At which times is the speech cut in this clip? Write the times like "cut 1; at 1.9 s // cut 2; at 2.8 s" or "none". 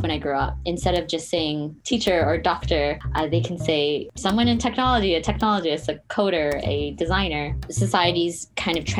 cut 1; at 1.7 s // cut 2; at 3.0 s // cut 3; at 4.1 s // cut 4; at 7.6 s